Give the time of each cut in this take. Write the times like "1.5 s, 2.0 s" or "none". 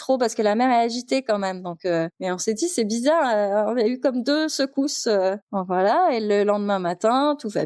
none